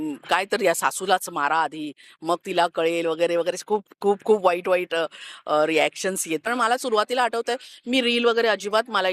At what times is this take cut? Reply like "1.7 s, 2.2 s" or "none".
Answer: 6.4 s